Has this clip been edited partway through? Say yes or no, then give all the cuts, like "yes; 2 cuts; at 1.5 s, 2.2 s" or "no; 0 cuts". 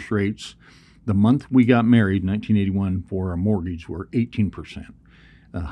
no; 0 cuts